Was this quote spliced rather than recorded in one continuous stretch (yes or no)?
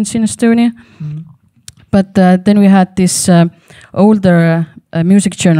no